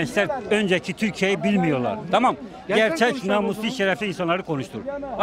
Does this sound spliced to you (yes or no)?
no